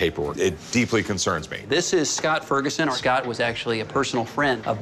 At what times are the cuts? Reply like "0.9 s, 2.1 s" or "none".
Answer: 1.6 s, 2.9 s